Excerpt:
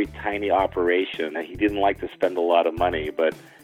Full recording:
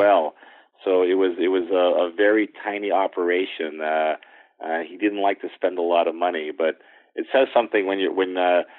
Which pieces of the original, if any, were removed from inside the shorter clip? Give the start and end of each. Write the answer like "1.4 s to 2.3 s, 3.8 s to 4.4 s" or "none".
3.8 s to 4.8 s